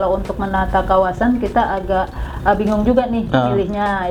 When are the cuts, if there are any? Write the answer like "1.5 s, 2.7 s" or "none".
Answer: none